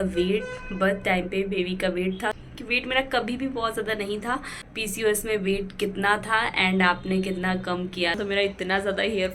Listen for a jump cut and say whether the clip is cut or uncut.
cut